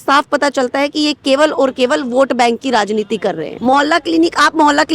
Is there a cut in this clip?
yes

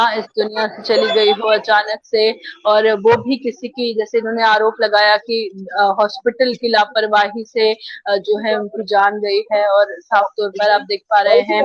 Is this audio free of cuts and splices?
yes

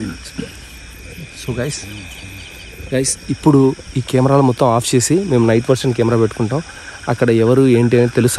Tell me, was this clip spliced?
no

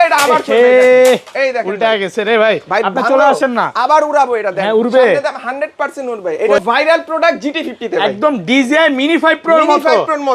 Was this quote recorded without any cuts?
no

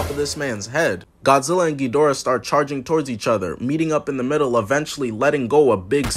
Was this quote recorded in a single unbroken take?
no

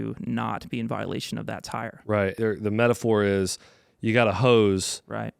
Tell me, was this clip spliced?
yes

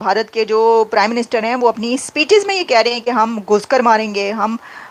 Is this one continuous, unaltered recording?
yes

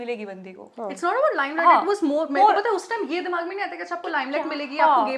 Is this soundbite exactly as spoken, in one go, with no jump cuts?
yes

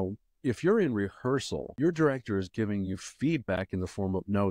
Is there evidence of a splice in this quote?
yes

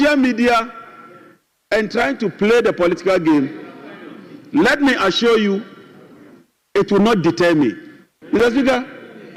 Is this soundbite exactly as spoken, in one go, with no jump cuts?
yes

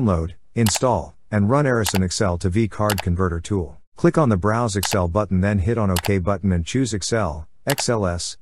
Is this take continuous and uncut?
no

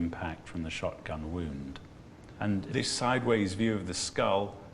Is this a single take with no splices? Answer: yes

